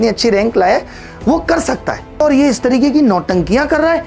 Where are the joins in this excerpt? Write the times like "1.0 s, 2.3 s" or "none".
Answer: 2.2 s